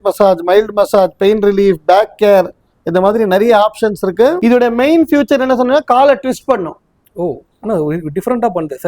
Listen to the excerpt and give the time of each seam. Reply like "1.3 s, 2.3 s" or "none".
4.4 s